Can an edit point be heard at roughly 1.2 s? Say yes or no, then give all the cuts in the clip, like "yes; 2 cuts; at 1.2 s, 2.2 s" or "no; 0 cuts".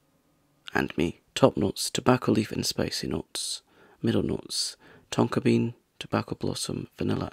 yes; 1 cut; at 1.2 s